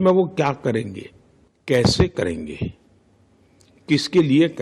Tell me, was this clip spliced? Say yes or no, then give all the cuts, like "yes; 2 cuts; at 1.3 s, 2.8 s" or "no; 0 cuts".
yes; 1 cut; at 1.8 s